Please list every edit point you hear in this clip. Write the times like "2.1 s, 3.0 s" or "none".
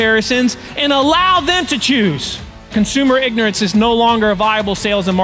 2.7 s